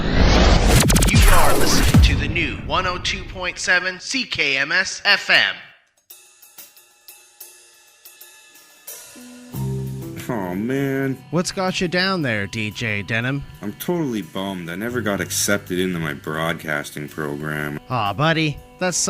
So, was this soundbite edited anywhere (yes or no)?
yes